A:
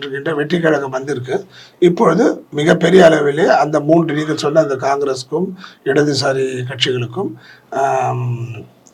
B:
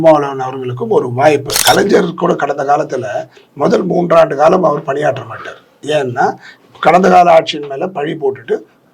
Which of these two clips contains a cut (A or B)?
B